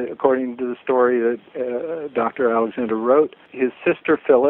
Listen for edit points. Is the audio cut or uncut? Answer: cut